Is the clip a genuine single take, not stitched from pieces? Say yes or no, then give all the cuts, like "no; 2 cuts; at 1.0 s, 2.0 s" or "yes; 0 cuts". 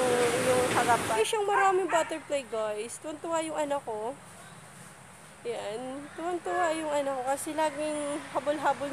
no; 1 cut; at 1.2 s